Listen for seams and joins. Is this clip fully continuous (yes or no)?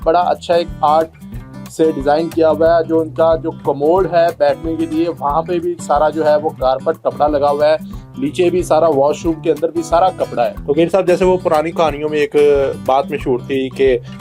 no